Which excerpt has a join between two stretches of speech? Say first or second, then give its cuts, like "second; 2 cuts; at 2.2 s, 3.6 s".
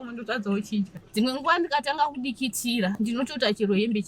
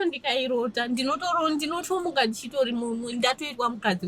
first; 2 cuts; at 1.0 s, 2.9 s